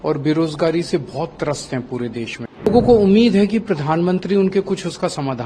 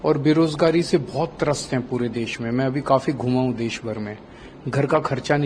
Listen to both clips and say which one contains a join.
first; 1 cut; at 2.7 s

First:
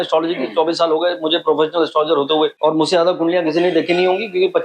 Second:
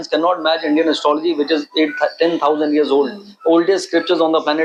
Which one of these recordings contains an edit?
first; 1 cut; at 2.5 s

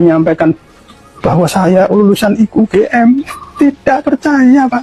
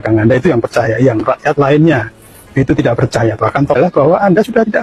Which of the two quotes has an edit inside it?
second; 1 cut; at 3.8 s

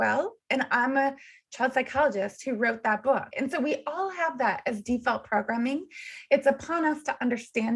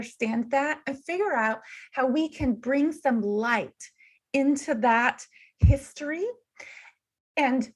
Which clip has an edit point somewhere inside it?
first; 1 cut; at 3.3 s

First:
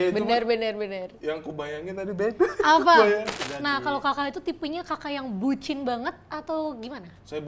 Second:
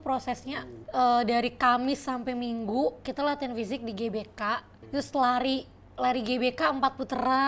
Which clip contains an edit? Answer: first; 1 cut; at 3.3 s

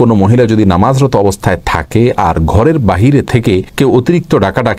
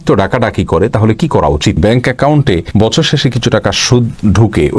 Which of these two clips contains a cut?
second; 1 cut; at 1.8 s

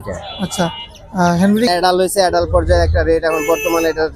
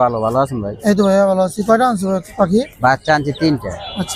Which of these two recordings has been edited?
first; 1 cut; at 1.7 s

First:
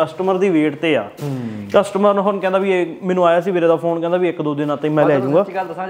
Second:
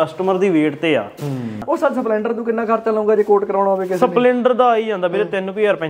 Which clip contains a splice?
second; 1 cut; at 1.6 s

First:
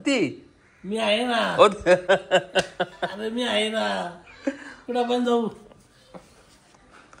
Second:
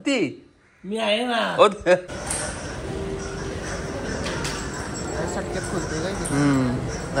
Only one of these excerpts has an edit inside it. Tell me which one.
second; 1 cut; at 2.0 s

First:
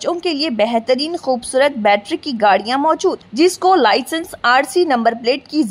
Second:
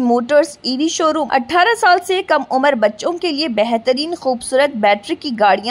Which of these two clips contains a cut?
second; 1 cut; at 1.2 s

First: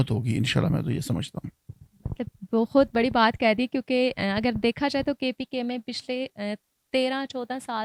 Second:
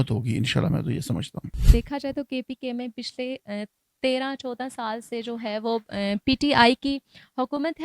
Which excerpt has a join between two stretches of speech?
second; 1 cut; at 1.7 s

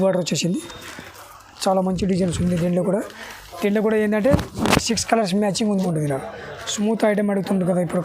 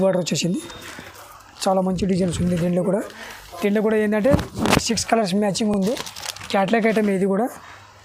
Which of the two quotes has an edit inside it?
first; 1 cut; at 5.7 s

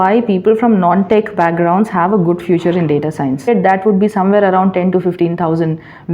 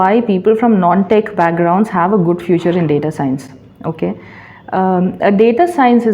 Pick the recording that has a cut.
first; 1 cut; at 3.4 s

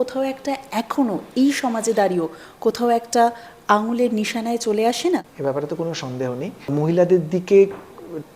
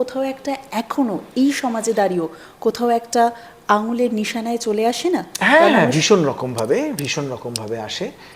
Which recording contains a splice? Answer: first; 2 cuts; at 5.3 s, 6.6 s

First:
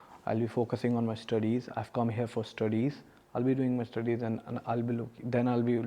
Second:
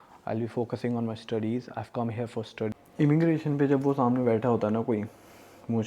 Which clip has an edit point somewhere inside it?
second; 1 cut; at 2.7 s

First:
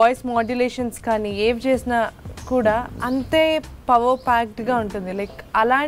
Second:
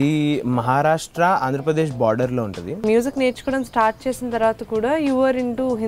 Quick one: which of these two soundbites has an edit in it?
second; 1 cut; at 2.8 s

